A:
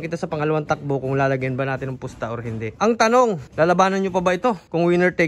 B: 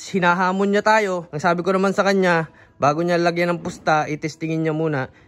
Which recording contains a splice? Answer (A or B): A